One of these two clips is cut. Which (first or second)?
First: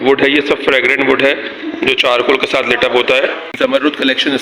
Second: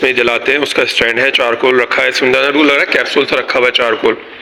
first